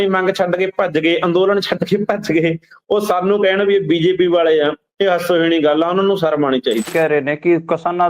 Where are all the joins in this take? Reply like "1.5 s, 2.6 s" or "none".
6.9 s